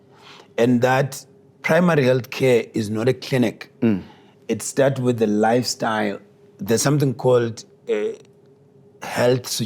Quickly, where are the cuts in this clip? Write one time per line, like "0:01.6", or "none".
none